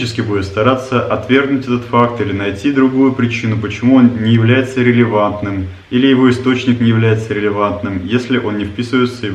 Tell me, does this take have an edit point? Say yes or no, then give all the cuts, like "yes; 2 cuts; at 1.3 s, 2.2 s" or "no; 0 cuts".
no; 0 cuts